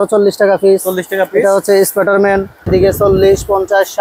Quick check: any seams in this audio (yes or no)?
yes